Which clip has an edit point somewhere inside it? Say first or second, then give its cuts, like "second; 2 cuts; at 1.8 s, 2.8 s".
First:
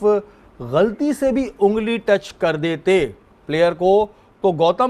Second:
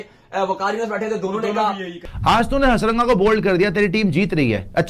second; 1 cut; at 2.0 s